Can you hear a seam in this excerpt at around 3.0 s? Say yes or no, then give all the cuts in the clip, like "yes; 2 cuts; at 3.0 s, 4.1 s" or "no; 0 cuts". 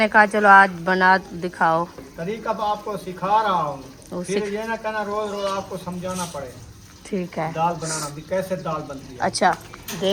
no; 0 cuts